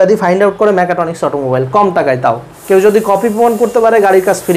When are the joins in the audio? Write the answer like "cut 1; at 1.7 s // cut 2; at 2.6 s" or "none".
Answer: cut 1; at 2.5 s